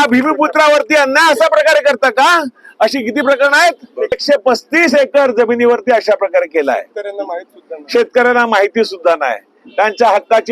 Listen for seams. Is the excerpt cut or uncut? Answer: cut